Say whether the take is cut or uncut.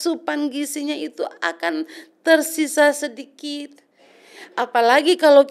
uncut